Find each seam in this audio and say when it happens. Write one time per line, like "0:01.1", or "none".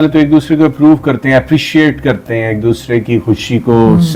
none